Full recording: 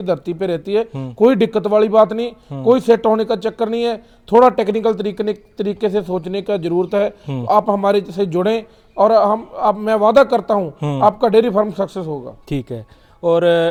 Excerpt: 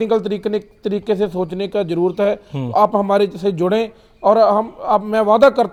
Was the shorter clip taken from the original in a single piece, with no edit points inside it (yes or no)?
yes